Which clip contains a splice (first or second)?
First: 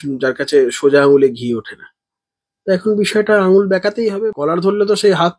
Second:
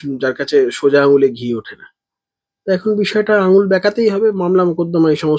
first